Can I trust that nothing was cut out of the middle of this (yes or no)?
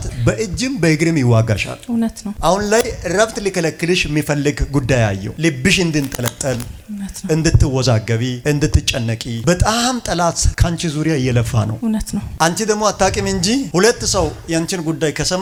yes